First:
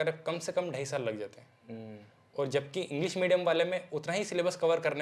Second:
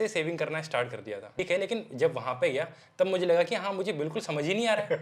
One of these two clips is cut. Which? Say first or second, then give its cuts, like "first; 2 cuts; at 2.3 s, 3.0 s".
second; 1 cut; at 1.4 s